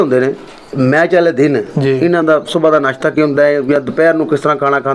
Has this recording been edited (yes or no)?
no